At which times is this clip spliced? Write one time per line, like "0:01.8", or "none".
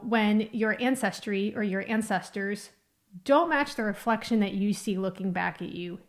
none